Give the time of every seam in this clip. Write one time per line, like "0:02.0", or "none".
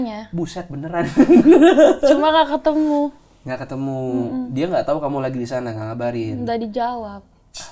none